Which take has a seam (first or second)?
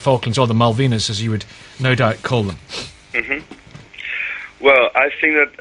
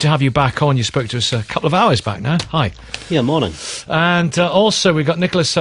second